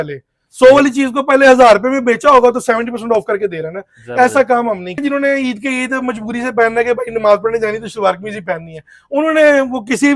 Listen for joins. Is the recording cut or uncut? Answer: cut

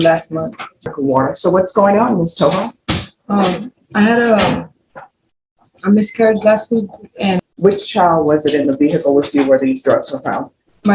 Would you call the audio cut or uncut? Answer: cut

